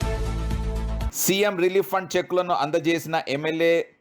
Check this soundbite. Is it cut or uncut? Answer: cut